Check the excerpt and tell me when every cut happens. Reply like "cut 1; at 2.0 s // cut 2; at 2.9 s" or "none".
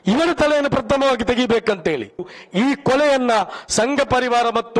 cut 1; at 2.4 s